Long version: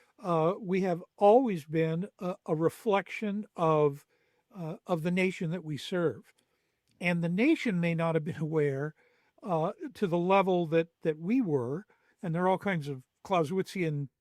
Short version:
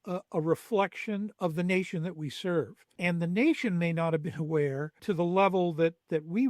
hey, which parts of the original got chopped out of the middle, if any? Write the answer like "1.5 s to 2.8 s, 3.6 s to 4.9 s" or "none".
3.5 s to 4.8 s, 6.3 s to 6.8 s, 9.0 s to 9.9 s